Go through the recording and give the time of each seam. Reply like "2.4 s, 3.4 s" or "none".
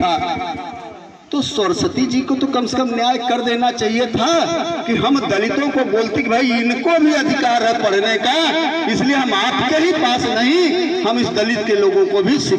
none